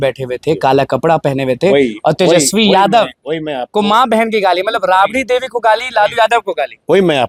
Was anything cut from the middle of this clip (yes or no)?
no